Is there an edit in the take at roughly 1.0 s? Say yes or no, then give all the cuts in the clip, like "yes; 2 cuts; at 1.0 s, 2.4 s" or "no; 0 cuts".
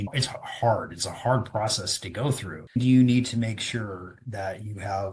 no; 1 cut; at 2.5 s